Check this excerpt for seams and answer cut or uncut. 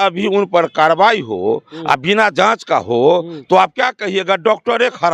uncut